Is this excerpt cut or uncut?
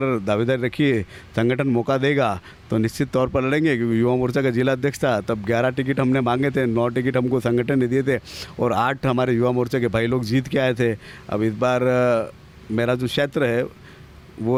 uncut